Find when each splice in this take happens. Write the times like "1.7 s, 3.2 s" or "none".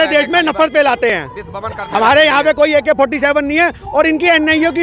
none

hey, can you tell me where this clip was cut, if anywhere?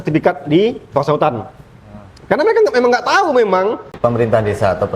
3.9 s

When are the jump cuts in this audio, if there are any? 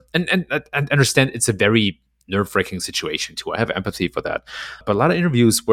4.8 s

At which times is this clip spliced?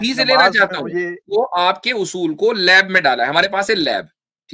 1.2 s

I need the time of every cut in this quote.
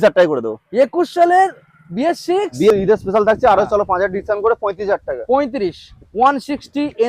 2.7 s

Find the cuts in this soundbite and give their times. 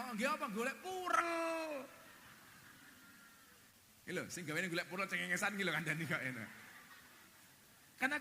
3.7 s

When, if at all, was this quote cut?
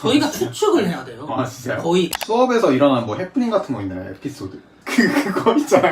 2.2 s

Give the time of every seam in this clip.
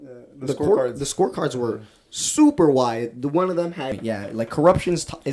3.9 s

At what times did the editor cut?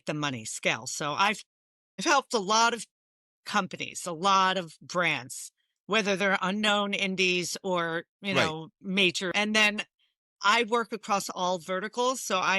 9.3 s

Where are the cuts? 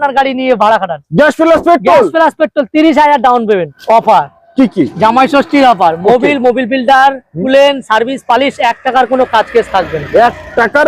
3.7 s

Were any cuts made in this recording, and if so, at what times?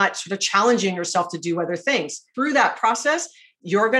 2.3 s

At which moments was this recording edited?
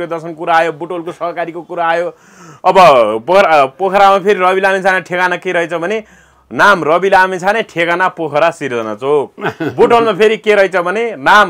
none

